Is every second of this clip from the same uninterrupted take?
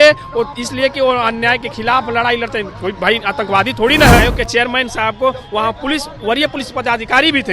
no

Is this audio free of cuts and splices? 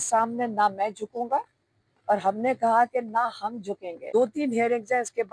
no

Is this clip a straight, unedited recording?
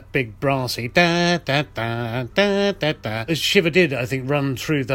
no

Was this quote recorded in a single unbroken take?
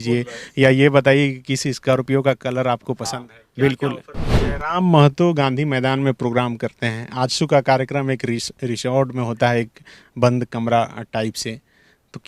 no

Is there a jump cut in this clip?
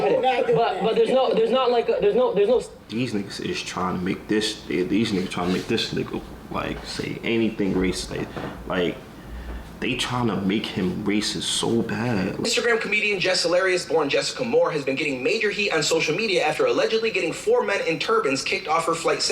yes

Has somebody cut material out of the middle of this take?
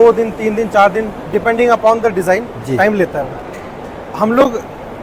no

